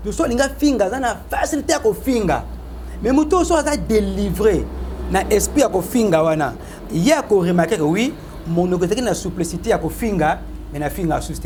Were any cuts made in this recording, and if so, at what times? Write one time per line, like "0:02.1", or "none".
none